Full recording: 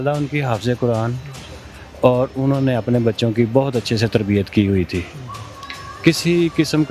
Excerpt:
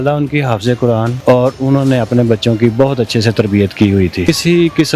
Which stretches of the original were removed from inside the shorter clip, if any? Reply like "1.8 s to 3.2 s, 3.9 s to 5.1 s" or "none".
1.1 s to 1.9 s, 5.0 s to 6.1 s